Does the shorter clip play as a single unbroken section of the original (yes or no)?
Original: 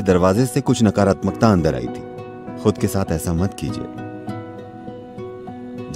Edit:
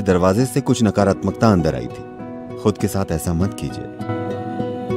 no